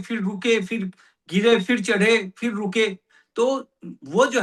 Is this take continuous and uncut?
yes; 0 cuts

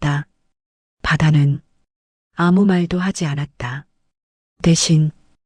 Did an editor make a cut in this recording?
no; 0 cuts

